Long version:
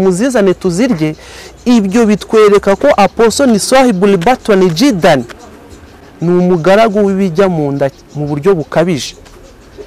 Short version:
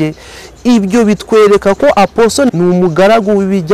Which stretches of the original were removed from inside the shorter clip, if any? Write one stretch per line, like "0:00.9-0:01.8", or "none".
0:03.5-0:06.2